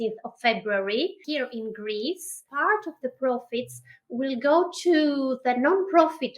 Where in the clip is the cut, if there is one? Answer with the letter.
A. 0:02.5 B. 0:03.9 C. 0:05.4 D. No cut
A